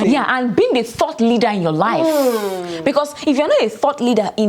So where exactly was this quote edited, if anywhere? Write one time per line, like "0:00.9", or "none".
none